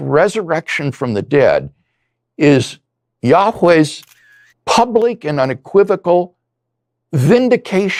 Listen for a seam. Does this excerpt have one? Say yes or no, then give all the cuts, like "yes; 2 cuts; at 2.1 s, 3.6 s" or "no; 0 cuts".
no; 0 cuts